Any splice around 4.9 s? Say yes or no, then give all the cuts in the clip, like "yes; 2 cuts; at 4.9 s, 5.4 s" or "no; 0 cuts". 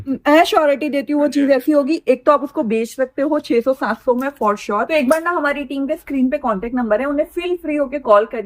yes; 1 cut; at 4.9 s